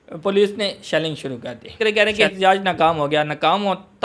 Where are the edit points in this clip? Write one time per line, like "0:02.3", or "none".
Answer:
0:01.7